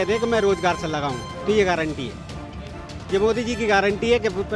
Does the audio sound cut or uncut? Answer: uncut